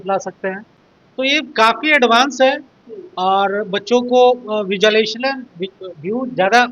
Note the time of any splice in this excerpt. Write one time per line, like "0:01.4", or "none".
none